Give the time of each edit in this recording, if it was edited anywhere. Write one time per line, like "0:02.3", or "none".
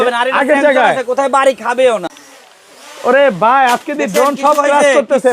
0:02.1